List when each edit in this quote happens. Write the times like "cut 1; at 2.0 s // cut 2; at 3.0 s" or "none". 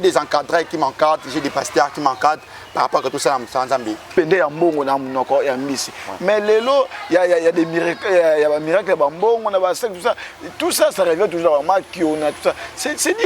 cut 1; at 4.1 s